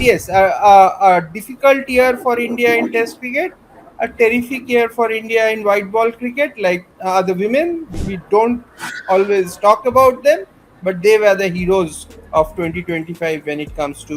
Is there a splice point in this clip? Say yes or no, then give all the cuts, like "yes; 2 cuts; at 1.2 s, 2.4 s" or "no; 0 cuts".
yes; 2 cuts; at 6.9 s, 7.9 s